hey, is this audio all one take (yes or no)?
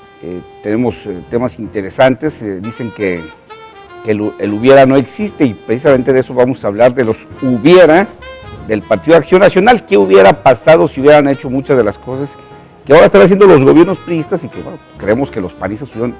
no